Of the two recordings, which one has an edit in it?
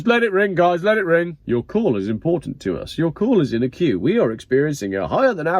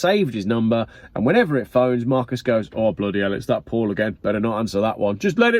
first; 1 cut; at 1.4 s

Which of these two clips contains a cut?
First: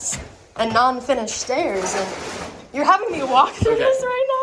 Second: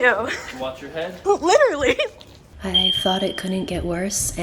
second; 2 cuts; at 1.2 s, 2.5 s

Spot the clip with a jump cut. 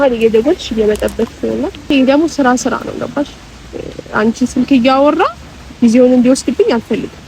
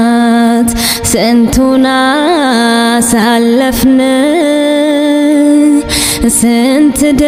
first; 1 cut; at 1.9 s

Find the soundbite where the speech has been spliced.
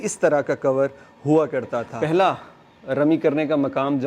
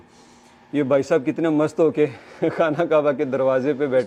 first; 1 cut; at 1.9 s

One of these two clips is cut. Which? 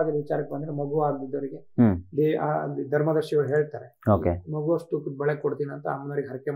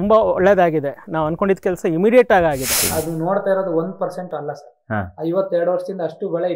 second; 1 cut; at 2.8 s

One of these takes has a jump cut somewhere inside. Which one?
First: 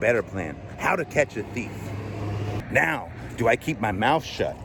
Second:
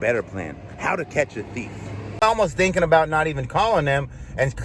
second; 1 cut; at 2.2 s

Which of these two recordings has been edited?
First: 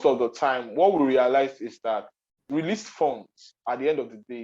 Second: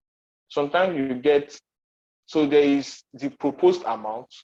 first; 1 cut; at 2.4 s

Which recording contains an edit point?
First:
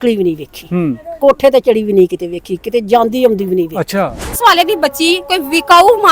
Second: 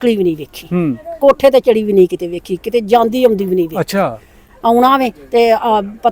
first; 1 cut; at 4.3 s

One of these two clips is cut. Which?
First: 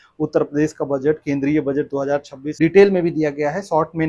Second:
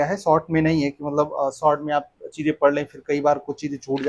first; 1 cut; at 2.4 s

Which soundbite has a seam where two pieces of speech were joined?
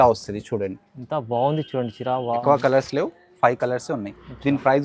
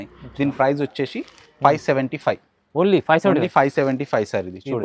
first; 1 cut; at 2.4 s

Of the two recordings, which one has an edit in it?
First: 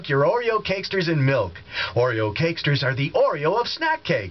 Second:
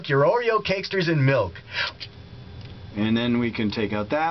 first; 1 cut; at 1.8 s

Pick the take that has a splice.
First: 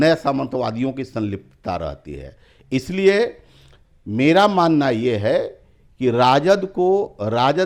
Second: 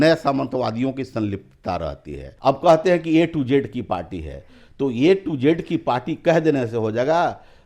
second; 1 cut; at 2.3 s

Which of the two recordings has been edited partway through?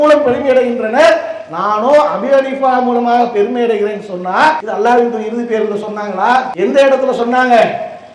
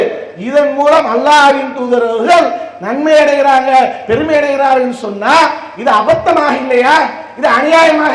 first; 2 cuts; at 4.6 s, 6.5 s

